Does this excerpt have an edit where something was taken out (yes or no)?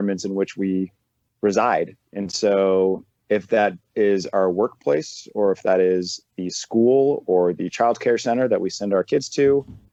no